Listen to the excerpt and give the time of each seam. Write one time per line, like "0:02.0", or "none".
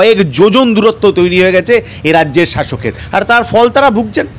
none